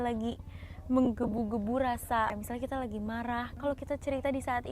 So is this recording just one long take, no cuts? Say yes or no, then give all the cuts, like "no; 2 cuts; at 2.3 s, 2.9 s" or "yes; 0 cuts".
no; 2 cuts; at 2.3 s, 3.5 s